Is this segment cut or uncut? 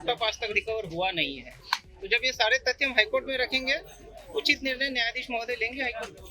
uncut